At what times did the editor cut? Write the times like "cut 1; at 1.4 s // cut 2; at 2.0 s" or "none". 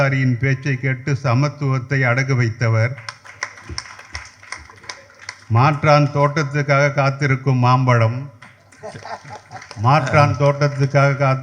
none